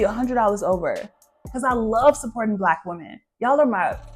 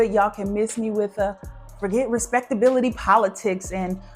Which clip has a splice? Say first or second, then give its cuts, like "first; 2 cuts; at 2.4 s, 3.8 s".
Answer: first; 1 cut; at 1.5 s